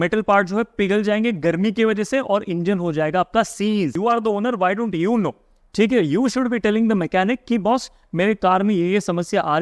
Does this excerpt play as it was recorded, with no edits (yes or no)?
no